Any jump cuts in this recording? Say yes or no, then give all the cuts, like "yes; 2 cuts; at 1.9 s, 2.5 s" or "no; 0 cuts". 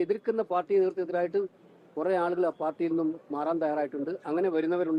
no; 0 cuts